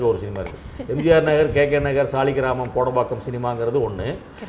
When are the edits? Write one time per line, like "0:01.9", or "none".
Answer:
none

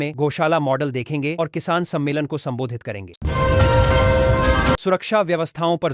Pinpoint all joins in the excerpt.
0:03.2
0:04.8

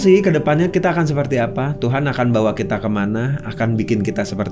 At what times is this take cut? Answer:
none

